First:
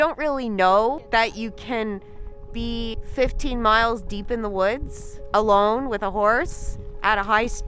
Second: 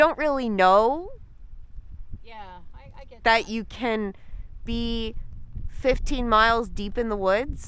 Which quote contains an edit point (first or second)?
first